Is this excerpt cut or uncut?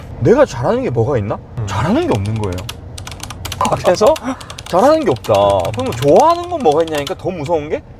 cut